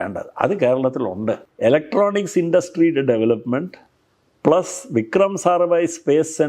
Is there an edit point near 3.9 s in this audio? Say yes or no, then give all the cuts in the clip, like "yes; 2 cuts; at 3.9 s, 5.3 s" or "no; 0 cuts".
no; 1 cut; at 1.5 s